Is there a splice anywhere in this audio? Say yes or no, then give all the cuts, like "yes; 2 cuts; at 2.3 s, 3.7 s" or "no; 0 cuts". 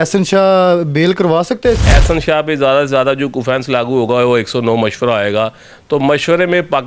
yes; 1 cut; at 1.8 s